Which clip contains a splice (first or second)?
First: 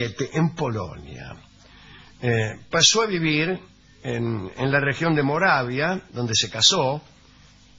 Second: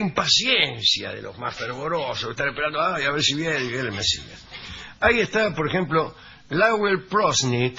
second